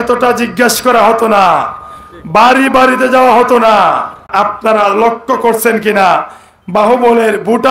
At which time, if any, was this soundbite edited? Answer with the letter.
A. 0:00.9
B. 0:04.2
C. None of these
B